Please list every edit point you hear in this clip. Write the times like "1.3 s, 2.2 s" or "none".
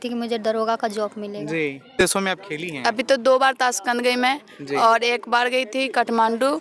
2.0 s